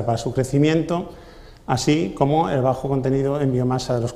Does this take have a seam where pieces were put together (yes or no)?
no